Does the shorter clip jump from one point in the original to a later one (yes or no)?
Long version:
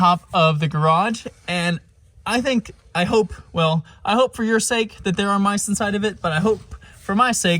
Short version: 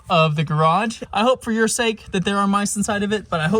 yes